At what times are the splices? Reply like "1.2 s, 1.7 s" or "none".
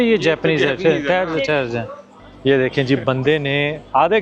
2.1 s